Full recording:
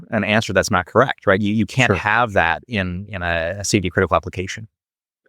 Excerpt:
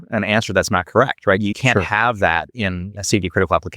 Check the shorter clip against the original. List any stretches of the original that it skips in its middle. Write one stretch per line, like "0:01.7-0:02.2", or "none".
0:01.5-0:01.7
0:03.1-0:03.6